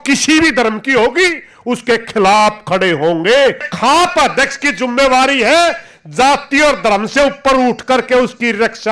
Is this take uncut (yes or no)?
no